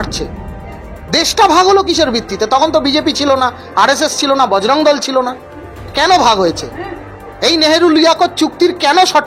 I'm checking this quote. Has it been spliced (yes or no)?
no